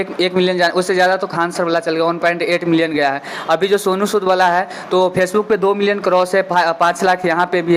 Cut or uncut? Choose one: uncut